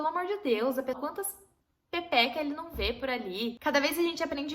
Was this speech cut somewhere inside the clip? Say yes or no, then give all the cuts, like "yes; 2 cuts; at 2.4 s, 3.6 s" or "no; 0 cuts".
yes; 2 cuts; at 1.0 s, 3.6 s